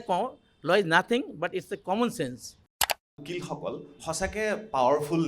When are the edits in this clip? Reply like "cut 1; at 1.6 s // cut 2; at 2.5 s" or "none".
cut 1; at 3.1 s